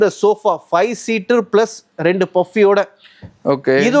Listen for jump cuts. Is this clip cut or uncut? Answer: uncut